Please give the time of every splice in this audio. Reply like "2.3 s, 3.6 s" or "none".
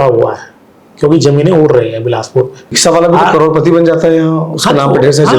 2.7 s